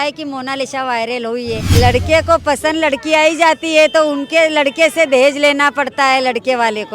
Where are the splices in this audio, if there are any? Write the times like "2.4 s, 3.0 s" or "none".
1.6 s